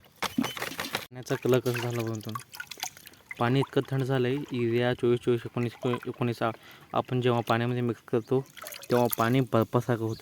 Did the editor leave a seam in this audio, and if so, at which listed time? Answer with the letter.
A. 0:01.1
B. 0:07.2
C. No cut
A